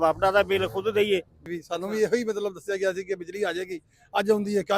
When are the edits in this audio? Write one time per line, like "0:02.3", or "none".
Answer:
0:01.4